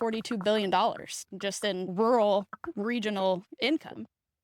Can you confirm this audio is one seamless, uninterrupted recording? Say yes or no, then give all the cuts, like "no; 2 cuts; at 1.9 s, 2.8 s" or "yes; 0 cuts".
no; 1 cut; at 1.9 s